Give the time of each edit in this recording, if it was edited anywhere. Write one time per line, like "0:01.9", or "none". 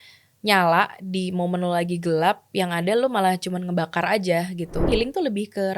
0:04.9